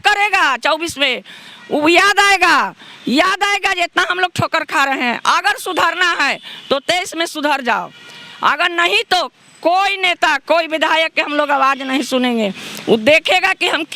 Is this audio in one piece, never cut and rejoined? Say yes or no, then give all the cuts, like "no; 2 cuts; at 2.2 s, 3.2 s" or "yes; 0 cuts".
yes; 0 cuts